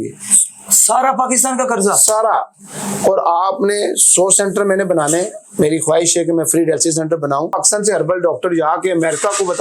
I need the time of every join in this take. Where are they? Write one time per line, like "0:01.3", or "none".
0:07.6

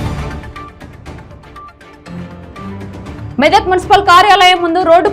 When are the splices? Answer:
0:01.7

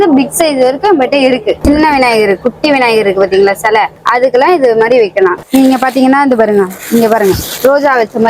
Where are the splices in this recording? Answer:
0:01.6
0:05.4

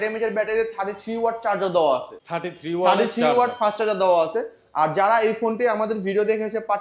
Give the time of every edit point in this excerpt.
none

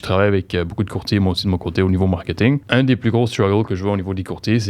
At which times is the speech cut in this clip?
0:02.6

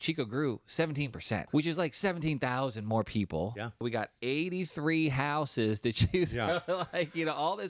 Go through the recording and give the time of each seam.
0:01.4
0:03.8

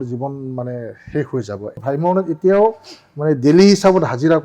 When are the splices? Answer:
0:01.8

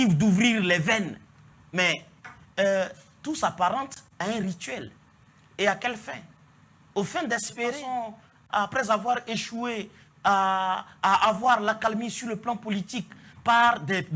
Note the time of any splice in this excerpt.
none

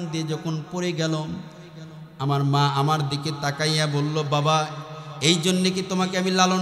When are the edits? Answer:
none

